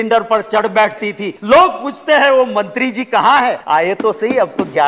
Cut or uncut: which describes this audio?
cut